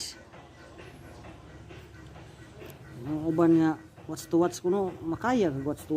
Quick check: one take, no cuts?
yes; 0 cuts

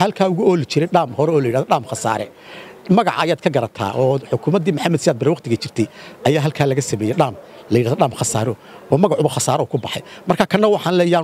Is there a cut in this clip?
no; 0 cuts

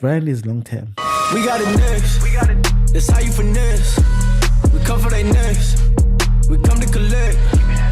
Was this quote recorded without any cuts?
no; 1 cut; at 1.0 s

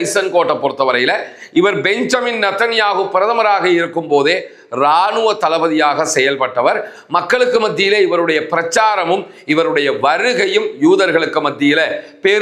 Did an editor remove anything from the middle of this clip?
no; 0 cuts

